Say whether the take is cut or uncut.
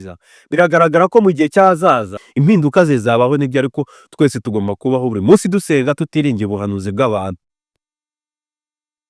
cut